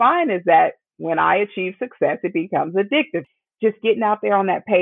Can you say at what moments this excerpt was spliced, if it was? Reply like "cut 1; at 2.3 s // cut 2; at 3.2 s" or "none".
cut 1; at 3.2 s